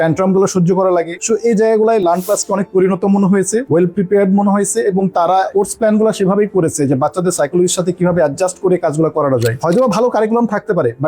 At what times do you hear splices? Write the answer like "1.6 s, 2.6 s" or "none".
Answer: 9.6 s